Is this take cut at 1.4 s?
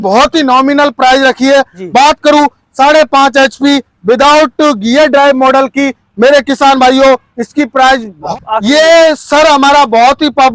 no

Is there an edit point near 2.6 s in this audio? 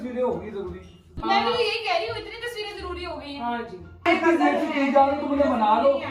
no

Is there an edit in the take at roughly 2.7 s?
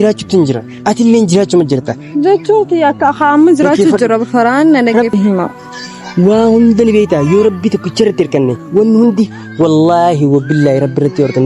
no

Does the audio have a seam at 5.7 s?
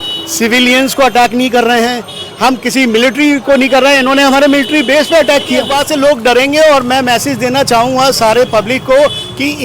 yes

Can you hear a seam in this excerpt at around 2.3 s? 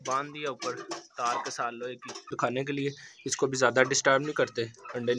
yes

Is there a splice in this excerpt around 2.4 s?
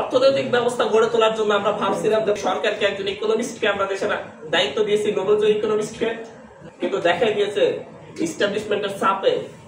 yes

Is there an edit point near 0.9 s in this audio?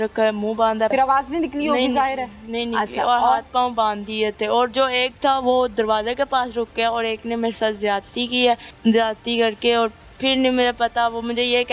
yes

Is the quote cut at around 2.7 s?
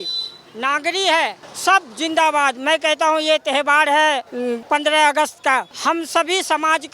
no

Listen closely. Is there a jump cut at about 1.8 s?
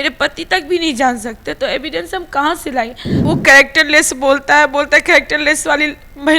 no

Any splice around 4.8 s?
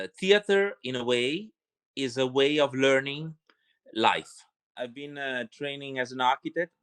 yes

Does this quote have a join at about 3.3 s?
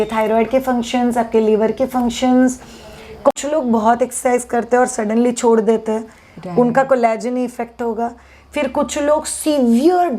yes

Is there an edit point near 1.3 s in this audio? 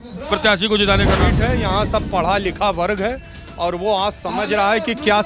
yes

